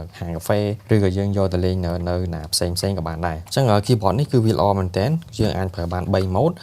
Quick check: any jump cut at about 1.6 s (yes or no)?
no